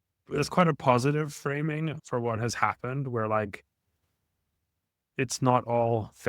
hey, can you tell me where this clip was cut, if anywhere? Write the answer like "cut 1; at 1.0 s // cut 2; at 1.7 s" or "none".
cut 1; at 2.0 s